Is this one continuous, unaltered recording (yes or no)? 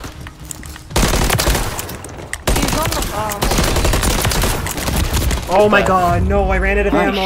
yes